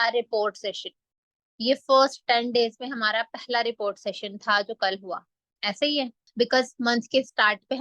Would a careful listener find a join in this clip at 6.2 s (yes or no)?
yes